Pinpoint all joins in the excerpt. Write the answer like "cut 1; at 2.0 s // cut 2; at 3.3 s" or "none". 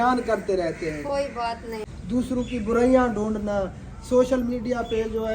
cut 1; at 1.9 s